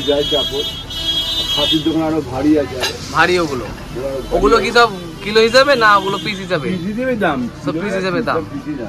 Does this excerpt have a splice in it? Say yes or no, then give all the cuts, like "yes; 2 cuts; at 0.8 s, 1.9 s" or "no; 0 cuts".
no; 0 cuts